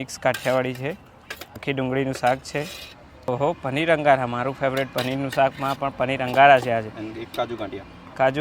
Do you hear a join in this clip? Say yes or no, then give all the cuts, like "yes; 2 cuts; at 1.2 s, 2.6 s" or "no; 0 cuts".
yes; 2 cuts; at 1.6 s, 3.1 s